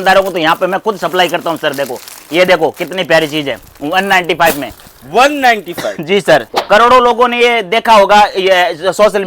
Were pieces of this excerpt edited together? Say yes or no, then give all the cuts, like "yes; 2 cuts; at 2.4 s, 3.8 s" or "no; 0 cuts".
yes; 1 cut; at 6.5 s